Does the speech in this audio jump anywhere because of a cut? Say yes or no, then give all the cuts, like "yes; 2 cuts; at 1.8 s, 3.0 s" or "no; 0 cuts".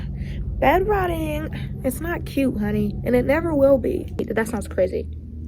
yes; 1 cut; at 4.2 s